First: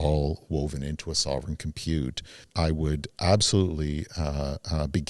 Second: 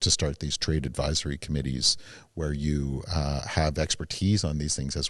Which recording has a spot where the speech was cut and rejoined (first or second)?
first